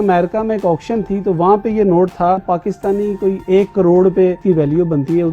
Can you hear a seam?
yes; 2 cuts; at 2.4 s, 4.4 s

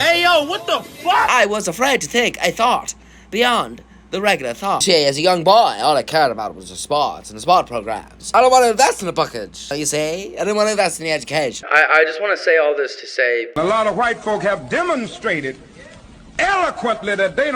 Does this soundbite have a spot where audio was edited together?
yes; 5 cuts; at 1.3 s, 4.8 s, 8.2 s, 9.7 s, 11.6 s

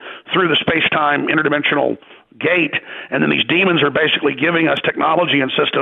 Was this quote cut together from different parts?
no; 0 cuts

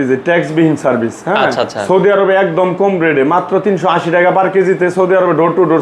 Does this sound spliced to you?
no; 0 cuts

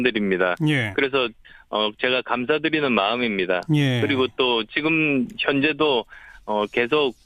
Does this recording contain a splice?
no; 0 cuts

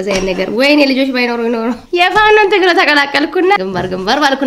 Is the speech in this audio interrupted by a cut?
yes; 2 cuts; at 1.8 s, 3.6 s

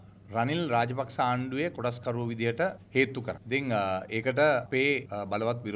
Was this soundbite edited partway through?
no; 0 cuts

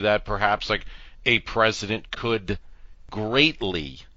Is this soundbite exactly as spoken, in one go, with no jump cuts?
no; 1 cut; at 3.1 s

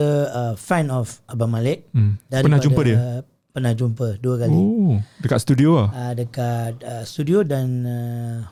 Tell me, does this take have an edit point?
no; 0 cuts

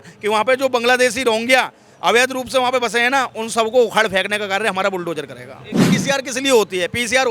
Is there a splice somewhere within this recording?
yes; 1 cut; at 5.9 s

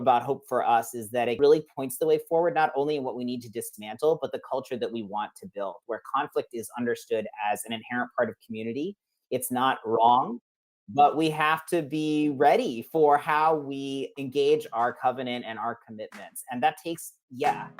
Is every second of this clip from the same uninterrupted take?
no; 1 cut; at 1.4 s

